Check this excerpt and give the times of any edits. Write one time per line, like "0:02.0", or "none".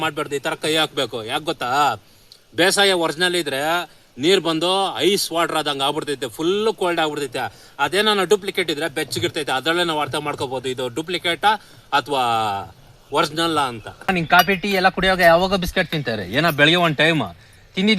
0:14.1